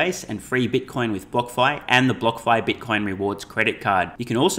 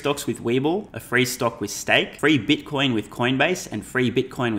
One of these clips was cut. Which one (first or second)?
second